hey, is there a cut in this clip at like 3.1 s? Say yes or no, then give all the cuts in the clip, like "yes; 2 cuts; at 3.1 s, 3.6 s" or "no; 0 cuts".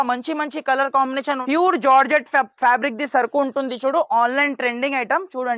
no; 1 cut; at 1.4 s